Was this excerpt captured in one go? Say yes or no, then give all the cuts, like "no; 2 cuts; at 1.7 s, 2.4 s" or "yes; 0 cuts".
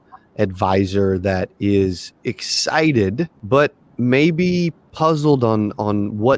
no; 2 cuts; at 3.4 s, 4.8 s